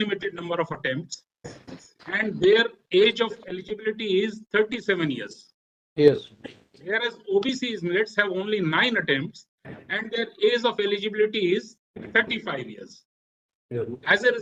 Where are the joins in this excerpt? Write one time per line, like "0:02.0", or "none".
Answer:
none